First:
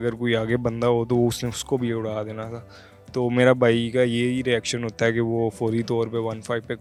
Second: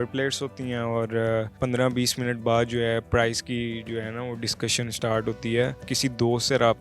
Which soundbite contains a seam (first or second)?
second